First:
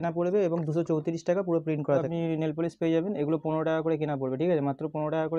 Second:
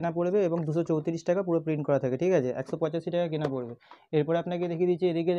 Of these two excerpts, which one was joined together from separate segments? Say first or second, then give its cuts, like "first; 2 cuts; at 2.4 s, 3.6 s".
first; 1 cut; at 2.0 s